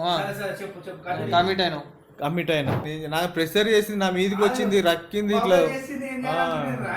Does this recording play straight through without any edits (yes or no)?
no